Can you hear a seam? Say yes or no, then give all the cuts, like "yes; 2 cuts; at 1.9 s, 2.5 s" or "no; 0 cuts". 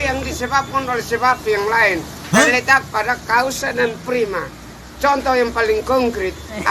yes; 1 cut; at 2.5 s